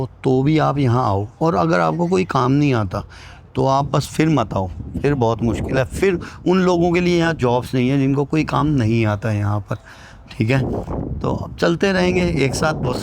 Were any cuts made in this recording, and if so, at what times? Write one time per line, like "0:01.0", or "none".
none

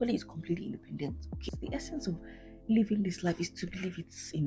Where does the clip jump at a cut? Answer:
0:01.4

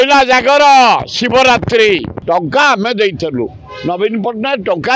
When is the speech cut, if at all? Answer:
0:02.1

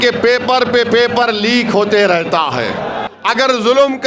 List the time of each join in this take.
0:03.0

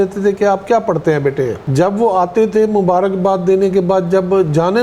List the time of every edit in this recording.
0:01.6

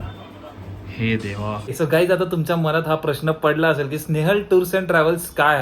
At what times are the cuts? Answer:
0:01.8

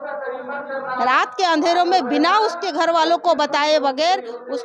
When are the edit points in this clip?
none

